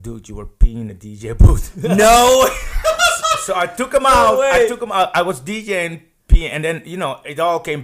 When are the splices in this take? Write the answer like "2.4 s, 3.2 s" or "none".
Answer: none